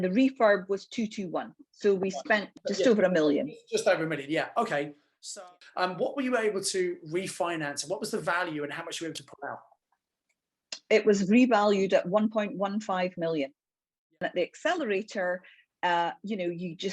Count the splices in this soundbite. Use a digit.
3